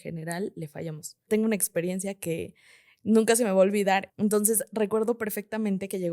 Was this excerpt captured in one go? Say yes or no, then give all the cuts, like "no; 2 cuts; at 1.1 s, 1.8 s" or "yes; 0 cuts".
no; 2 cuts; at 1.2 s, 4.1 s